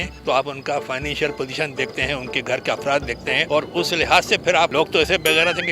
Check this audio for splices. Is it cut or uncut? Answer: cut